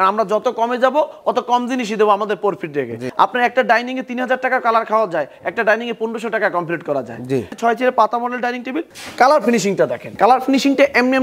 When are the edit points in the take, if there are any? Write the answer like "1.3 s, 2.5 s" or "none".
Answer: 3.0 s, 7.5 s, 8.9 s, 10.0 s